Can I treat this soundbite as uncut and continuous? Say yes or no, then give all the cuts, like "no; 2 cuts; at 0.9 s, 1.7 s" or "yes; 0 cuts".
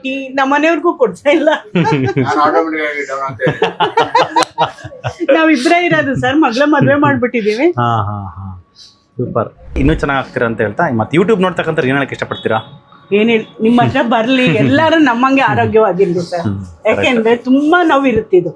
no; 1 cut; at 9.8 s